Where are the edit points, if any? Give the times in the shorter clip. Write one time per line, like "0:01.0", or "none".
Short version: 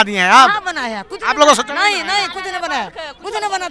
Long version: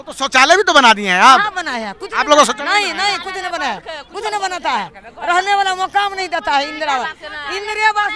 none